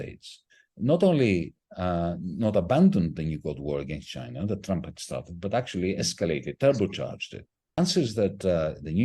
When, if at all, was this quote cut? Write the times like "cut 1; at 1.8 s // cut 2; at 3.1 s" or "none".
cut 1; at 7.8 s